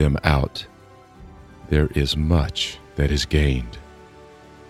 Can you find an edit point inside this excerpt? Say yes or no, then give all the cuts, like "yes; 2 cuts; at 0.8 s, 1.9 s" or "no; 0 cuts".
yes; 1 cut; at 3.7 s